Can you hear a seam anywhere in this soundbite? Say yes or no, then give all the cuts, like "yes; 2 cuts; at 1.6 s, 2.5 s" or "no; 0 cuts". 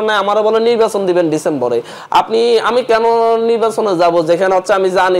no; 0 cuts